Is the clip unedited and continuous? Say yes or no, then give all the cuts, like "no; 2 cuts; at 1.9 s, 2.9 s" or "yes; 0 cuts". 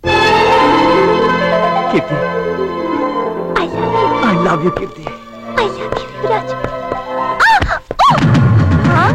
yes; 0 cuts